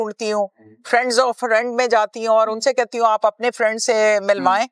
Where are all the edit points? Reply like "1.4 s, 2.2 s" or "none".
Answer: none